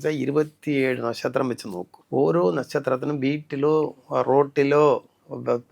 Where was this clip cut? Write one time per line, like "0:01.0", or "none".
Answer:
0:01.9